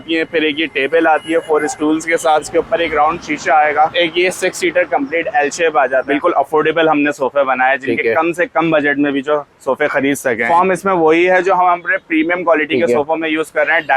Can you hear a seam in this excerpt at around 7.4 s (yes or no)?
no